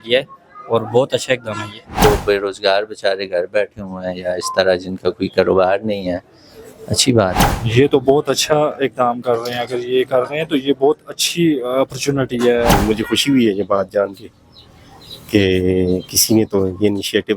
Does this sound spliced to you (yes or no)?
yes